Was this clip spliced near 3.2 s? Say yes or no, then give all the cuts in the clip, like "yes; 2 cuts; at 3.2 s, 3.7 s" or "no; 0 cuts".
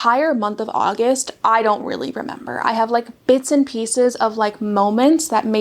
no; 0 cuts